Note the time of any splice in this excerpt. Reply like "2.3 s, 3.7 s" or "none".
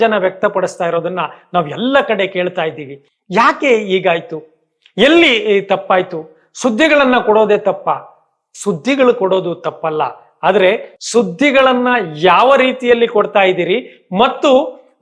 none